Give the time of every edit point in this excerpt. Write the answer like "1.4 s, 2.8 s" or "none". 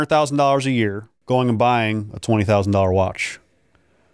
1.1 s

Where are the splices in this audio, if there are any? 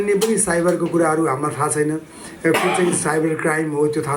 none

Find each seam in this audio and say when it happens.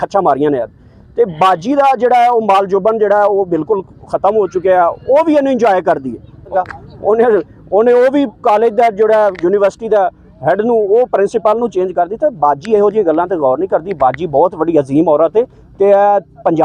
6.5 s

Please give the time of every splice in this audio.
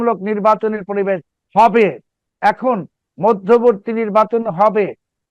none

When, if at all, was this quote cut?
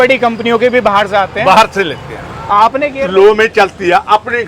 3.0 s

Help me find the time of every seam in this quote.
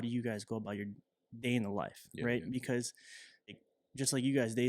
3.7 s

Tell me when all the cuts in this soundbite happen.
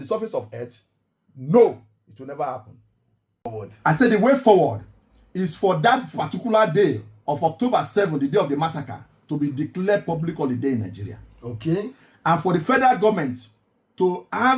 3.4 s

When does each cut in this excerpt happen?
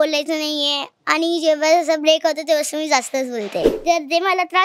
3.7 s

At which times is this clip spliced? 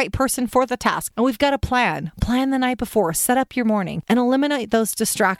1.0 s, 3.9 s

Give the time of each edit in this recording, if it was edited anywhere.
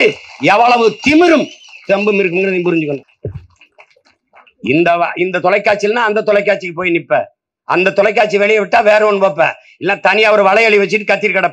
3.0 s

